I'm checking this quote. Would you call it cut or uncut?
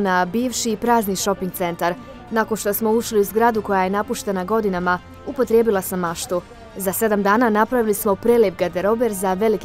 cut